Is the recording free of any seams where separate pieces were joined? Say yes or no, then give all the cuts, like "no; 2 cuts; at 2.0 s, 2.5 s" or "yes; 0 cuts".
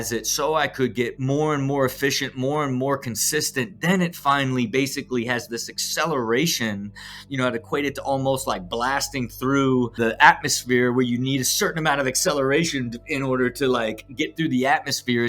no; 2 cuts; at 1.2 s, 9.9 s